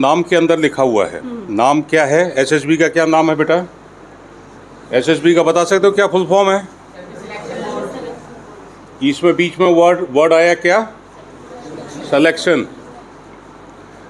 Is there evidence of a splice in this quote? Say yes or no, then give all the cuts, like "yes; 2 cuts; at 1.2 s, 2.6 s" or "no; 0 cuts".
no; 0 cuts